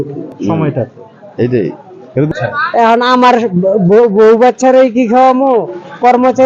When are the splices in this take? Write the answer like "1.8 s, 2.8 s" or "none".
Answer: 2.3 s

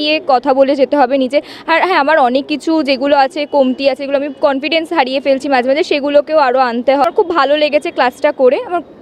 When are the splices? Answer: 7.0 s

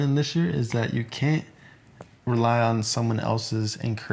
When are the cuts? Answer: none

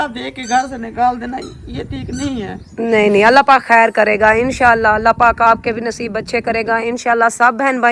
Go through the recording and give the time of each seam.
none

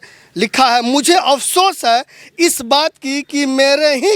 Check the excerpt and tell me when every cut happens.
none

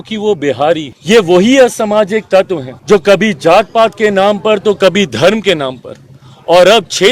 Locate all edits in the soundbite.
0.9 s, 2.7 s

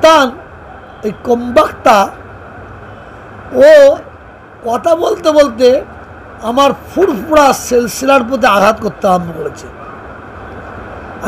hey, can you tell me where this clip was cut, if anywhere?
none

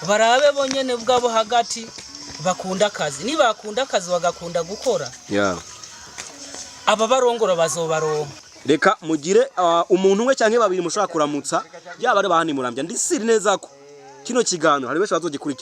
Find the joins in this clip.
8.4 s

